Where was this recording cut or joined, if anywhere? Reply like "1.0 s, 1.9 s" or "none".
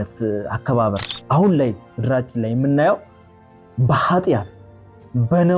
1.1 s